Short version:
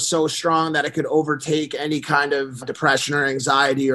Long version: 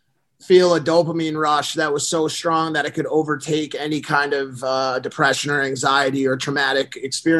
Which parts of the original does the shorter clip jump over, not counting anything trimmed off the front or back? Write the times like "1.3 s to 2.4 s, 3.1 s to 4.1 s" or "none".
4.6 s to 5.0 s

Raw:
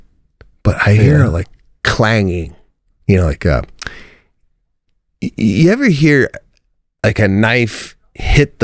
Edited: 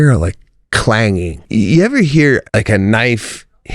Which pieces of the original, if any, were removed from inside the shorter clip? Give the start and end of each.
2.6 s to 5.3 s, 6.3 s to 7.0 s

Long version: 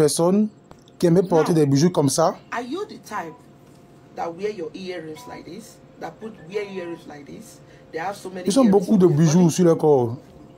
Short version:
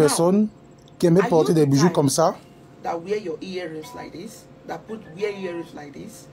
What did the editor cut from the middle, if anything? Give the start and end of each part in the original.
2.4 s to 3.8 s

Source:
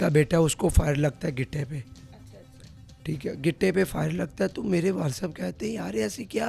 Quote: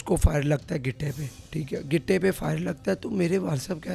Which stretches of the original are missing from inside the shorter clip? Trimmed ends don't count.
1.9 s to 2.9 s

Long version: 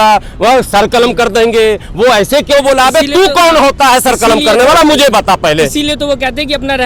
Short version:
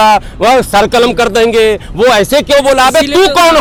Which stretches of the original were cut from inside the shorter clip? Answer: none

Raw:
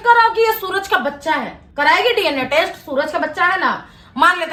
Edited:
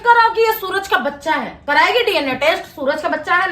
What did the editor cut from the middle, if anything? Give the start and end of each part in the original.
1.5 s to 1.6 s

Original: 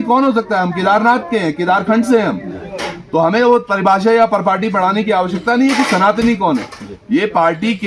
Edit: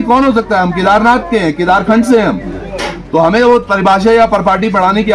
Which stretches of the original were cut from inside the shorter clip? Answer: none

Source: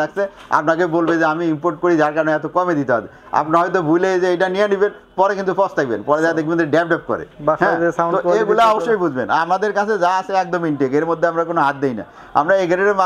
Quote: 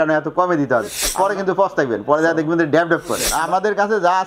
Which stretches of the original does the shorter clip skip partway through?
3.2 s to 5.0 s, 7.3 s to 9.3 s

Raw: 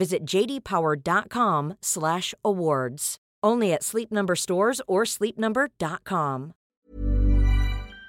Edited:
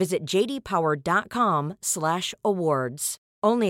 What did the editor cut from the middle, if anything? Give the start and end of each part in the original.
none

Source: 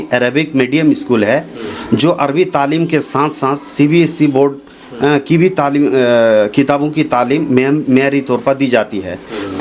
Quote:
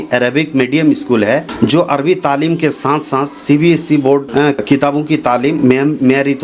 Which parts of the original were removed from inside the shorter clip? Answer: 1.5 s to 1.8 s, 4.9 s to 6.5 s

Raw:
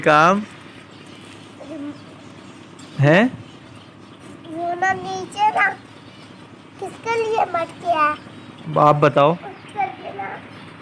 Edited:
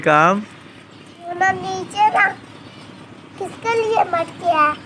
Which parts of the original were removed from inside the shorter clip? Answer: 1.3 s to 4.7 s

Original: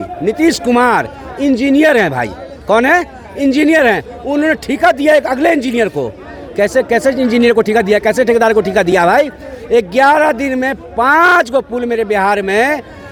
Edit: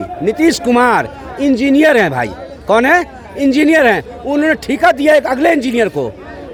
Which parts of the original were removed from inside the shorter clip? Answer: none

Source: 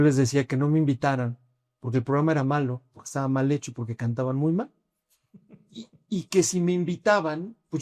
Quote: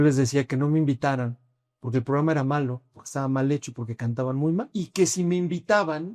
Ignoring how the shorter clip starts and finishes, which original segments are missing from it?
4.7 s to 6.1 s

